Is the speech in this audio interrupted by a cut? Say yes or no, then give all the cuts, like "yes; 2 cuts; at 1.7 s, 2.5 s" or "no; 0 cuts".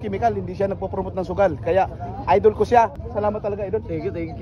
yes; 1 cut; at 3.0 s